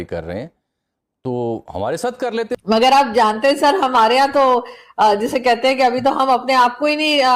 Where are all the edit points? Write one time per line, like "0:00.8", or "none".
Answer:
0:02.6